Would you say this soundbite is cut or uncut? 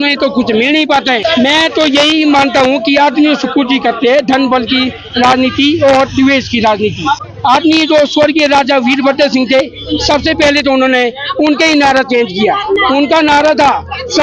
cut